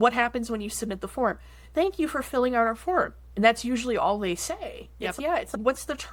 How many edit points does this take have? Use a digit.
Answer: 0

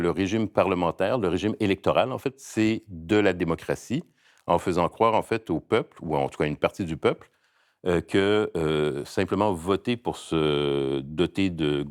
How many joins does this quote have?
1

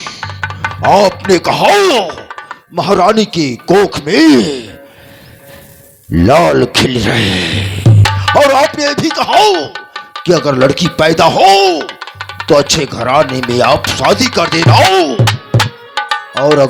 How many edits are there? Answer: 0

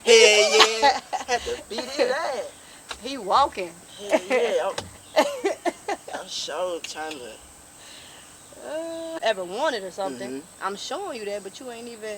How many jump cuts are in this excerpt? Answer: 1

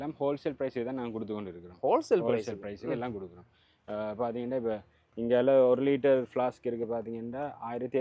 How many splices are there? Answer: 0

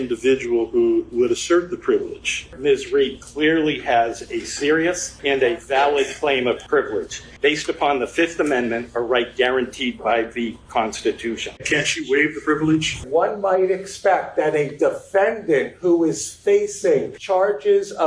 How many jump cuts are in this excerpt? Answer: 7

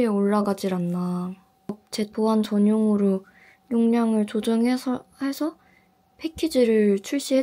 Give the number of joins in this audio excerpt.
1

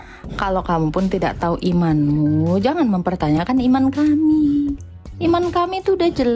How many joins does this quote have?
0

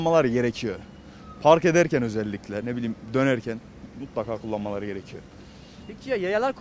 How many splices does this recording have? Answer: 0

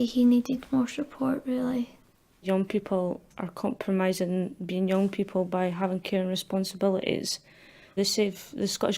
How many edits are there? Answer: 2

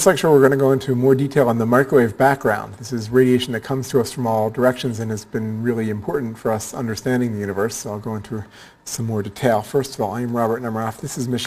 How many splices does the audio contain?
1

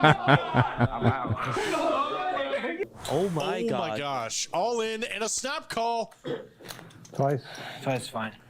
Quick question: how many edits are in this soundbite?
1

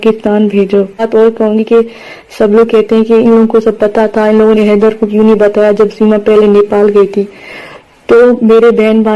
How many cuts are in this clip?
1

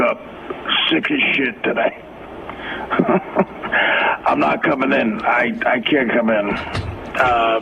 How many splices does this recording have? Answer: 1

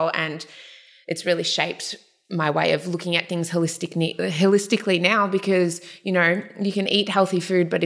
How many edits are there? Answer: 0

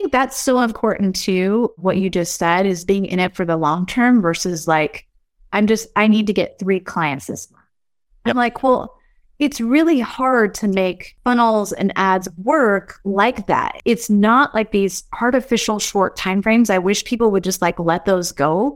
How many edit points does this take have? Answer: 2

